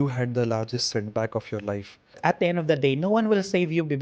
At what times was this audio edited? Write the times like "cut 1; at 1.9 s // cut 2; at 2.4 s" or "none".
cut 1; at 2.2 s